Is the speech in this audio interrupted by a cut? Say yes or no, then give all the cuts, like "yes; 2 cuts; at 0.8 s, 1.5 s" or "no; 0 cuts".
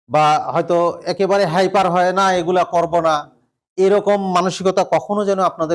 no; 0 cuts